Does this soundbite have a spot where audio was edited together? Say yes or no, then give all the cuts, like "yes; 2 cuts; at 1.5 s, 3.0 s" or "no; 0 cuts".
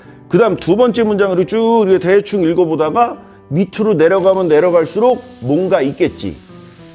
no; 0 cuts